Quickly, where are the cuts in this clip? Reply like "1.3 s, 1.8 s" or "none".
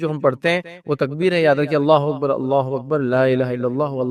none